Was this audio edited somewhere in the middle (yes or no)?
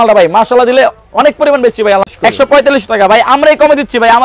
yes